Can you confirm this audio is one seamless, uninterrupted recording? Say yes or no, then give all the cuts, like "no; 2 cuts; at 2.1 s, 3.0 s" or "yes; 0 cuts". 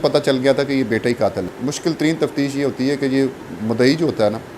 no; 1 cut; at 1.5 s